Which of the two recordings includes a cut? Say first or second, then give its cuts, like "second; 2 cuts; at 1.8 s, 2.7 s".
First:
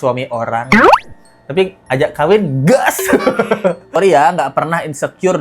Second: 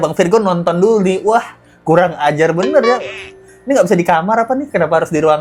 first; 1 cut; at 4.0 s